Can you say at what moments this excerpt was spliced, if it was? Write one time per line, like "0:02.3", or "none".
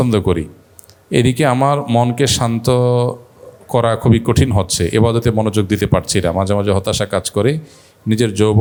none